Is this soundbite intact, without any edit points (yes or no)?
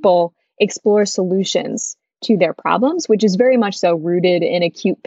yes